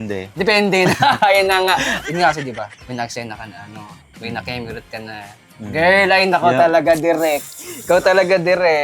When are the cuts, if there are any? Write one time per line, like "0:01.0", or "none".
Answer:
0:01.9
0:02.8